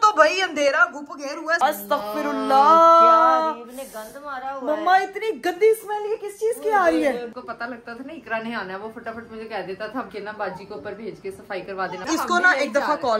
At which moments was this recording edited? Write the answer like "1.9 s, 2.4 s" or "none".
1.6 s, 7.3 s, 10.1 s, 12.0 s

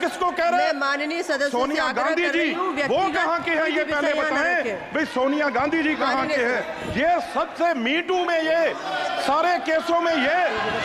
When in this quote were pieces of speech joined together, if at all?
none

